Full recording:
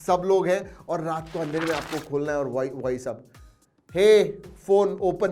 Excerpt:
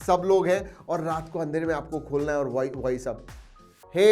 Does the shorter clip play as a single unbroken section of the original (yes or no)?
yes